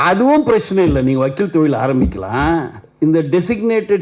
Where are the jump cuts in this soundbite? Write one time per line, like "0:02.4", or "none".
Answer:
0:02.8